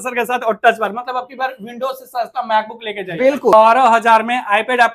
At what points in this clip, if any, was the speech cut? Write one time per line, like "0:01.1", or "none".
0:03.5

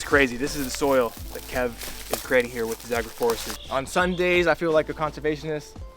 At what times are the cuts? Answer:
0:03.6

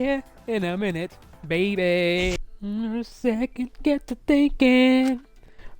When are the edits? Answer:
0:02.4

